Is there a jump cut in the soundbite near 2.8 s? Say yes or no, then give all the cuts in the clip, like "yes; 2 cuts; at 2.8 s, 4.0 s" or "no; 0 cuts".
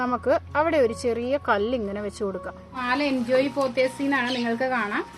yes; 1 cut; at 2.8 s